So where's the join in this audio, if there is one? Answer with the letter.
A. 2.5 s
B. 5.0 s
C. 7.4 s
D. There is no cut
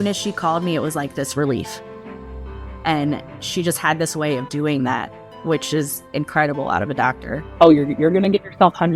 C